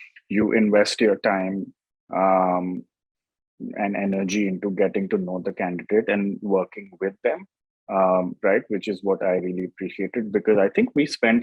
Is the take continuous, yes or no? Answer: yes